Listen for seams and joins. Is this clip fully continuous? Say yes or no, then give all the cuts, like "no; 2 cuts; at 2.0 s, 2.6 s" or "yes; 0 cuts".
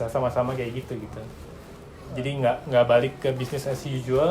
no; 1 cut; at 2.1 s